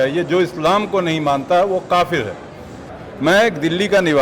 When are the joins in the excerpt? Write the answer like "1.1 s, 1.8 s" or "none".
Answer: 2.8 s